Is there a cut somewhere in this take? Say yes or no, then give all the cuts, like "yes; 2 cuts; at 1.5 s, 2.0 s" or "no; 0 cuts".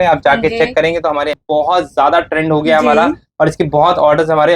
yes; 1 cut; at 1.3 s